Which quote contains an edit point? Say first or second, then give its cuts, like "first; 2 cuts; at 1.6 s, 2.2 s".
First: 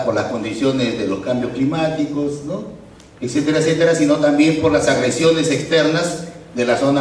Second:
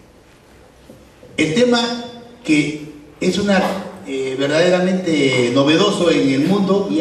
second; 1 cut; at 3.3 s